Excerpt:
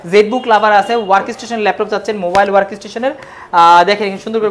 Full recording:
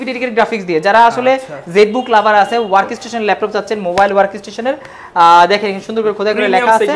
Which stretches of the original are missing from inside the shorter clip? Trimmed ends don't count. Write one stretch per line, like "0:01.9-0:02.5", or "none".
none